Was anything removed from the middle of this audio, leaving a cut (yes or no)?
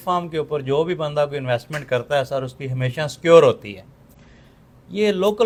no